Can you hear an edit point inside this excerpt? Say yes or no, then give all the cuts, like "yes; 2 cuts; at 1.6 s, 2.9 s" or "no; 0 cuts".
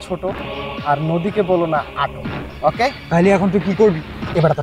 no; 0 cuts